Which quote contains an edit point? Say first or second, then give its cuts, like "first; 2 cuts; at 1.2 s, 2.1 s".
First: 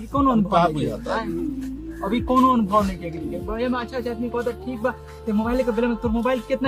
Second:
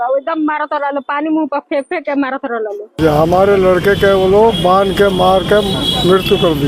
second; 1 cut; at 2.9 s